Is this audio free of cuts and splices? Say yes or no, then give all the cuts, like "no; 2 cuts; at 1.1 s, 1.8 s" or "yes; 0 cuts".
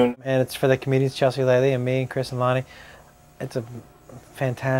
no; 1 cut; at 1.4 s